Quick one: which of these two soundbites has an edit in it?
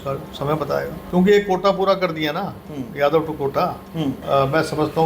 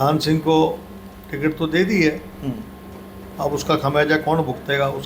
first; 2 cuts; at 1.0 s, 4.2 s

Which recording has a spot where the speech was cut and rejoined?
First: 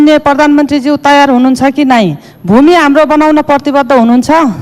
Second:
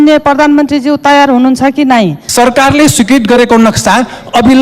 second; 1 cut; at 2.2 s

